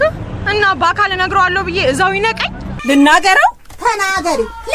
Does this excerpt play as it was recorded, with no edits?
no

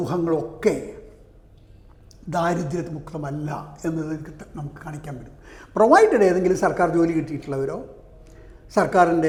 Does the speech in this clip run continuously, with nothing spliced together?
yes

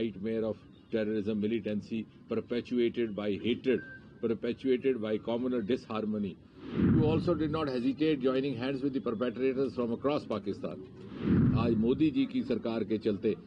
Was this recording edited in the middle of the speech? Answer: yes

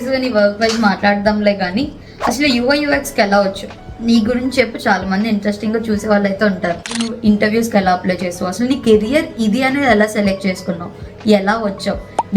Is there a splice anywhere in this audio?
yes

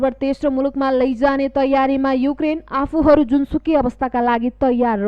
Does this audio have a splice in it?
no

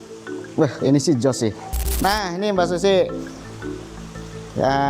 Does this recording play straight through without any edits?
no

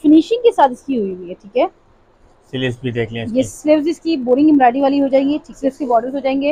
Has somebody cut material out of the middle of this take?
yes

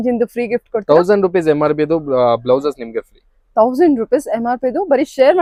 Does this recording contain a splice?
no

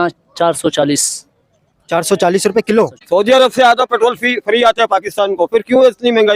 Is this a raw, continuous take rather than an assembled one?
yes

